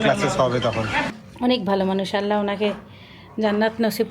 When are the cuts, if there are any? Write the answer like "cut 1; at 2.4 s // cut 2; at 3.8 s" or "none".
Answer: cut 1; at 1.1 s